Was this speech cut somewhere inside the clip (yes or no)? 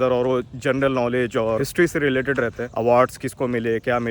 no